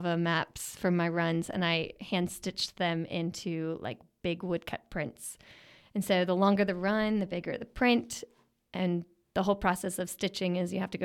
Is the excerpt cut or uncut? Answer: uncut